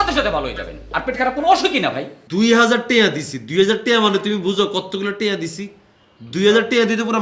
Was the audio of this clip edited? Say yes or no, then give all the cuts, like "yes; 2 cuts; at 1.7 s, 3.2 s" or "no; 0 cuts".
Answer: yes; 1 cut; at 2.1 s